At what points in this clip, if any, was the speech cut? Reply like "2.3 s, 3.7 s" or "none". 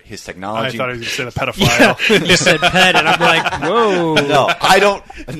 none